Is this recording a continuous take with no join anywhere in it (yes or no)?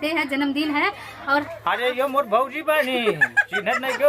no